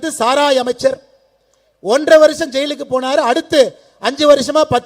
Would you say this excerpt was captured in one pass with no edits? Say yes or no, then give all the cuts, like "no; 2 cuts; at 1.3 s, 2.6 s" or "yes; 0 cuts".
yes; 0 cuts